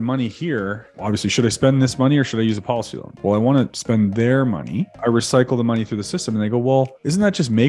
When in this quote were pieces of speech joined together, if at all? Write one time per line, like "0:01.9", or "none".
0:00.9
0:03.1
0:03.8
0:05.0